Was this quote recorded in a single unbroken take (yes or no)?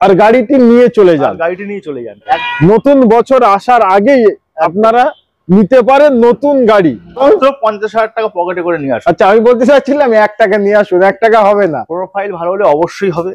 no